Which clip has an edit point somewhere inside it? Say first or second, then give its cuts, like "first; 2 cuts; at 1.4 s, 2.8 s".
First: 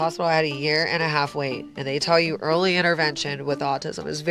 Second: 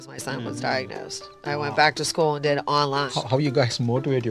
second; 1 cut; at 3.1 s